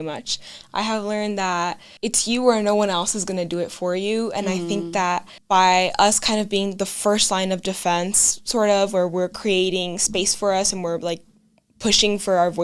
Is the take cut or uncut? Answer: cut